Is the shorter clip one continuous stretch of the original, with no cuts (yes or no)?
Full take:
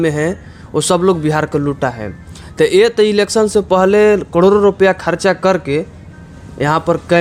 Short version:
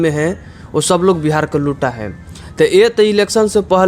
yes